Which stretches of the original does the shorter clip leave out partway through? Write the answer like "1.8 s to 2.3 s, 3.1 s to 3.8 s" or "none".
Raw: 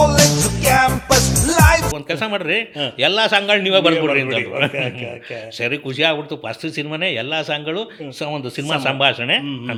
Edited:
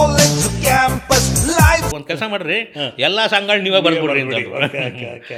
none